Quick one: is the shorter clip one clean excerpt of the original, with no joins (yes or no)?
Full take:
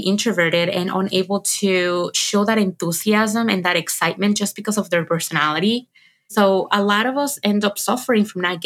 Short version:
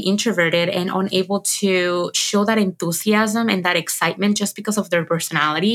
yes